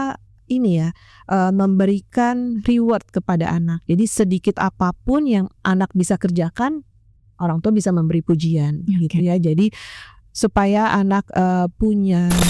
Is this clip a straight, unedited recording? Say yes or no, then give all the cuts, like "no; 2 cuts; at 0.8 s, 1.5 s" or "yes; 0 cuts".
yes; 0 cuts